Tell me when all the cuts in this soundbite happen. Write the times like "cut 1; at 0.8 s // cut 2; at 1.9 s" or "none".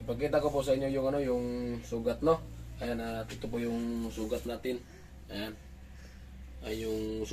none

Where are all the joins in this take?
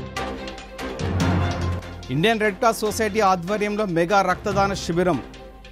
none

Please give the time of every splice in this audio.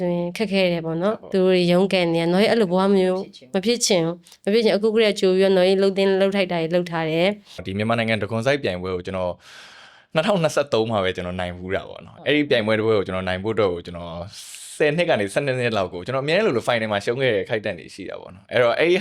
cut 1; at 7.7 s

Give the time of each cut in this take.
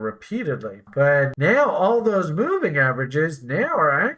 cut 1; at 1.3 s

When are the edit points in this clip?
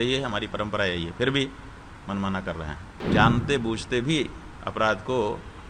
cut 1; at 2.8 s

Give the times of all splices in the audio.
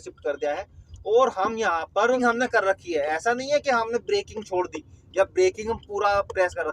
cut 1; at 2.2 s

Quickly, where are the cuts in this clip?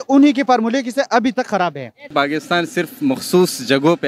cut 1; at 2.1 s

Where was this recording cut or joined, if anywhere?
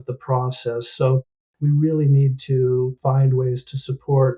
cut 1; at 3.0 s

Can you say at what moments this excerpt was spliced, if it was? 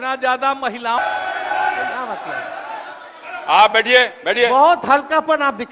cut 1; at 1.0 s

